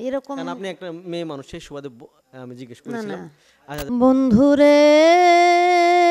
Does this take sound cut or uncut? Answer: cut